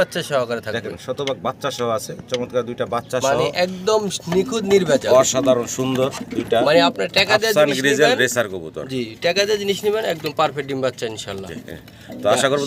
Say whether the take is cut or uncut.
uncut